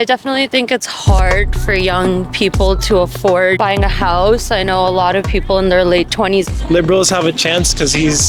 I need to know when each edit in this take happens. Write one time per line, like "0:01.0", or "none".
0:03.6
0:06.5